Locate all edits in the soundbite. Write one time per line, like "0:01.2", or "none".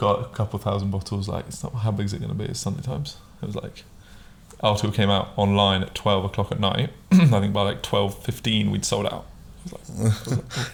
none

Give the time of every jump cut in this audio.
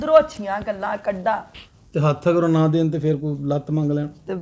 0:01.5

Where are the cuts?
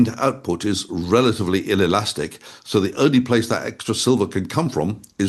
none

